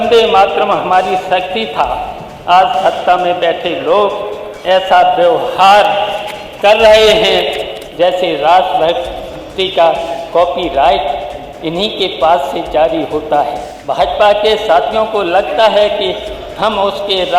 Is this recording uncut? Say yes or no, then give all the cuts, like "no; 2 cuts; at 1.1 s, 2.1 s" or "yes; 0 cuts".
no; 2 cuts; at 7.8 s, 13.7 s